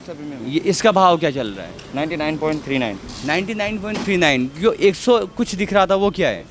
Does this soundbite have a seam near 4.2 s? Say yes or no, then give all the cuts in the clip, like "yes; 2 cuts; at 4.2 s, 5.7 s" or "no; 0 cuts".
no; 0 cuts